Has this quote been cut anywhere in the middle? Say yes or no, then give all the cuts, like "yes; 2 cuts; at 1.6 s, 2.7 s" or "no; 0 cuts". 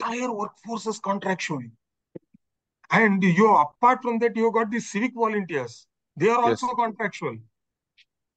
no; 0 cuts